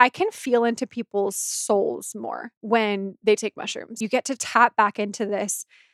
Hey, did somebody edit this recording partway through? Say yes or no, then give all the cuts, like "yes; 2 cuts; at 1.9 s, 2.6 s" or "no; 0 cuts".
yes; 2 cuts; at 2.5 s, 3.9 s